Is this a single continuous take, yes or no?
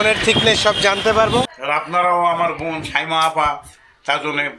no